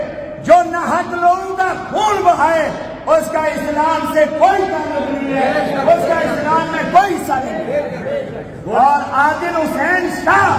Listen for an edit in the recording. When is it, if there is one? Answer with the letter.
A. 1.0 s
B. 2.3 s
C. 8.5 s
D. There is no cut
C